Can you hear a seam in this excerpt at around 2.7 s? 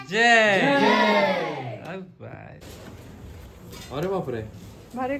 yes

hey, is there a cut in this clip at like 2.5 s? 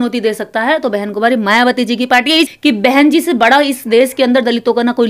yes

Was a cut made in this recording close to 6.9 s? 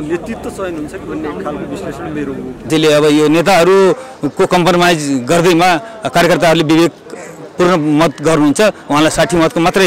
no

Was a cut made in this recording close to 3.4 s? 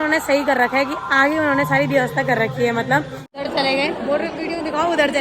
yes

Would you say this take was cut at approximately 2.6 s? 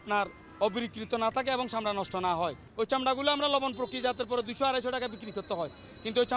yes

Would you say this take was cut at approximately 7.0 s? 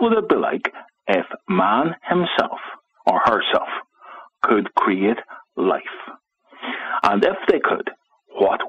yes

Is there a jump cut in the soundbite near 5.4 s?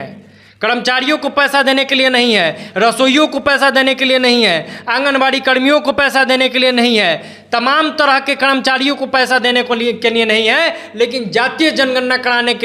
no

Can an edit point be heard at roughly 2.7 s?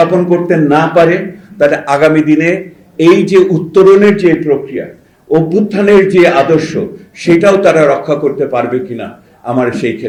no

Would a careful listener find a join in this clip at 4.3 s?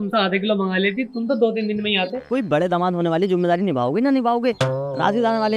no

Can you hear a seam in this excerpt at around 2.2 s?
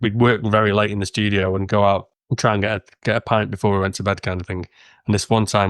yes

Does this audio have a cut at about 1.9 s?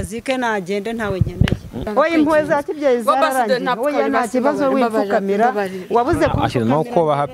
yes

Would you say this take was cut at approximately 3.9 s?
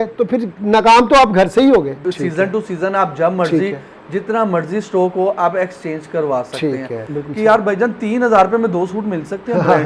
no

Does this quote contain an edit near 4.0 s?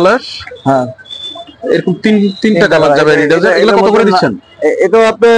no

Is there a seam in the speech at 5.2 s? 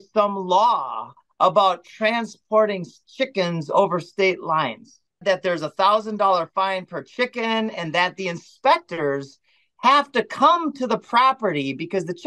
yes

